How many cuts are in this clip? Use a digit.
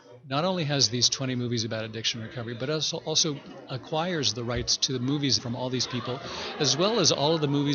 1